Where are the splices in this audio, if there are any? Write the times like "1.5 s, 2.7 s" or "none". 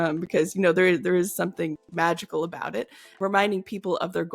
3.0 s

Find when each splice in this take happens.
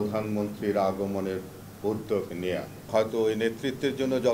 2.9 s

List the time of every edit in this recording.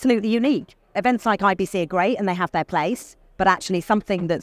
1.0 s

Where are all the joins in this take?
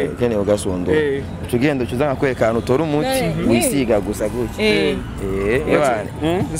none

